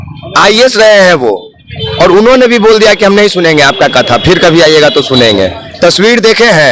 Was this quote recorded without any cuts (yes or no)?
no